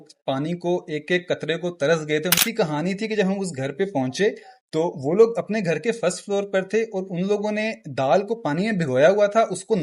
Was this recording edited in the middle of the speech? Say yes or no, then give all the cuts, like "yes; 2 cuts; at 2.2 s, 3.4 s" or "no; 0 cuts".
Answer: yes; 1 cut; at 2.4 s